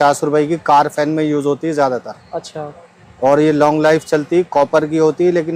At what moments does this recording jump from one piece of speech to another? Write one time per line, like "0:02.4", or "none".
none